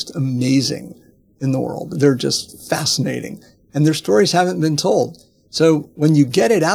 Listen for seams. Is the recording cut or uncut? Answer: uncut